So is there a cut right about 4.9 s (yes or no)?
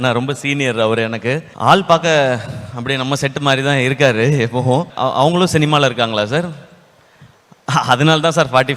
yes